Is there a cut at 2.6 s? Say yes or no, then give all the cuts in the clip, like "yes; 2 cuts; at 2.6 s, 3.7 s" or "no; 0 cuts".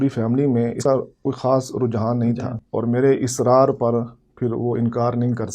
yes; 2 cuts; at 0.8 s, 2.6 s